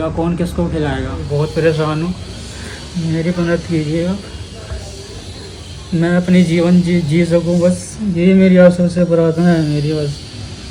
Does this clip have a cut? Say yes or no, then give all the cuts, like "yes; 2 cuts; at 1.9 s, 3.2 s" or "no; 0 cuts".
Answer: yes; 1 cut; at 1.2 s